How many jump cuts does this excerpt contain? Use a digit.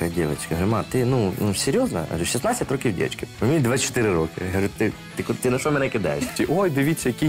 2